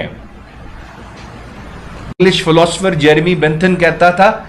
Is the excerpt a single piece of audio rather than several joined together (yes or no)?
no